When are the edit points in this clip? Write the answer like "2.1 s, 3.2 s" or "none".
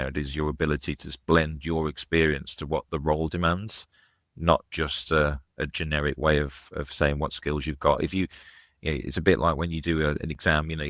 none